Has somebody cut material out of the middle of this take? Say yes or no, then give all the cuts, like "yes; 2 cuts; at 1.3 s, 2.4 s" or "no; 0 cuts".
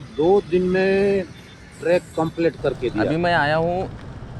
yes; 1 cut; at 3.1 s